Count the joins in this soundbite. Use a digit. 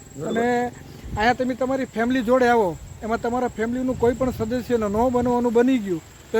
0